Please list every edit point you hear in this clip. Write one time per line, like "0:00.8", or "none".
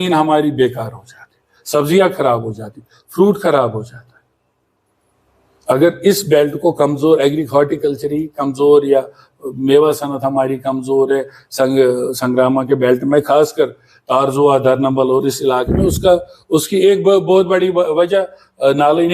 none